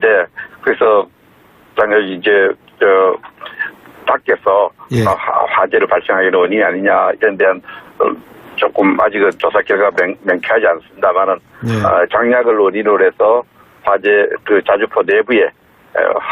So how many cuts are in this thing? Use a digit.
1